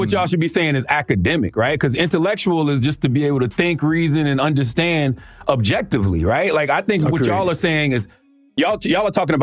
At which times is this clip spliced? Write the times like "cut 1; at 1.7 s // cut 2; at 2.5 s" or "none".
none